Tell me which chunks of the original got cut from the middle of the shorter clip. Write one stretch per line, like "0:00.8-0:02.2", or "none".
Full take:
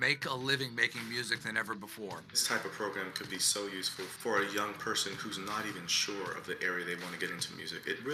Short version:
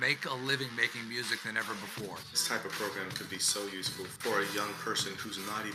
none